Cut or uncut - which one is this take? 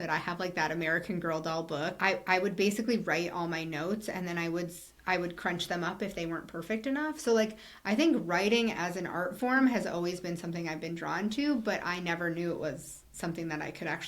cut